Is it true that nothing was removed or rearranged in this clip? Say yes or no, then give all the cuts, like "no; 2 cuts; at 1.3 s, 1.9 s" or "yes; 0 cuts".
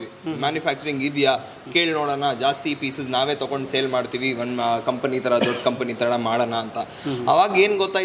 yes; 0 cuts